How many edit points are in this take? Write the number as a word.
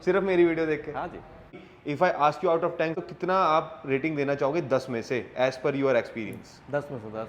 two